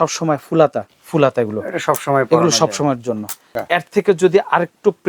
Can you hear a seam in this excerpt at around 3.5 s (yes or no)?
yes